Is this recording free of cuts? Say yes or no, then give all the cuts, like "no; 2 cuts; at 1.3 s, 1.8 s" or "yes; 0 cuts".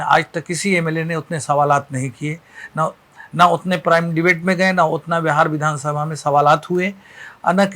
yes; 0 cuts